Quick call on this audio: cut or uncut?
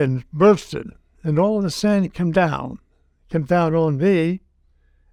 uncut